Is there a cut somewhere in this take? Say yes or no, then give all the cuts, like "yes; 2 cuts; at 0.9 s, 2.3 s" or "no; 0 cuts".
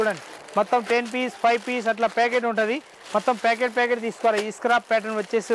no; 0 cuts